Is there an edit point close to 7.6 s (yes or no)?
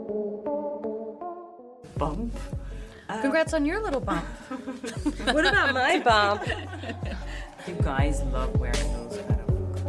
yes